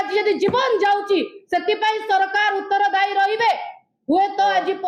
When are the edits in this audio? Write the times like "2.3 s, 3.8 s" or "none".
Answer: none

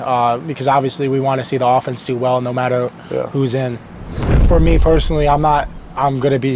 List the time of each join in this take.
4.4 s

